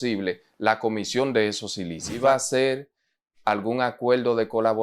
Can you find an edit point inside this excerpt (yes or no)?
yes